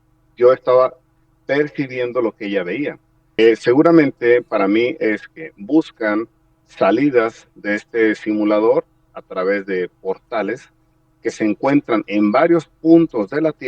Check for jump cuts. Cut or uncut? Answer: cut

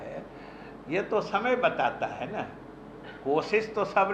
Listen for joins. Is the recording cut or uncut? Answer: uncut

